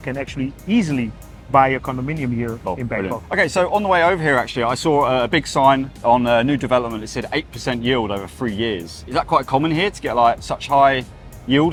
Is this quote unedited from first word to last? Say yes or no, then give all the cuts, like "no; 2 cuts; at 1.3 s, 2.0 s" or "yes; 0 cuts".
yes; 0 cuts